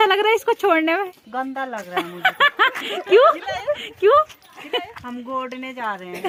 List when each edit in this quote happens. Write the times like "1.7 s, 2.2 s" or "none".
none